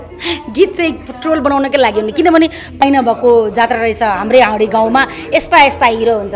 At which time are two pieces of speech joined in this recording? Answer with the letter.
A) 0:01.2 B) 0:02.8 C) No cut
B